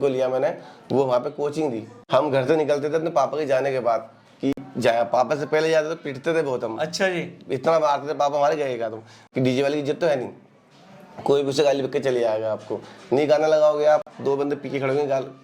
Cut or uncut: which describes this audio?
cut